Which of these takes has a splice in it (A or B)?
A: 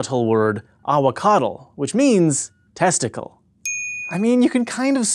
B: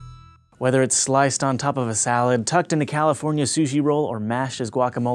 A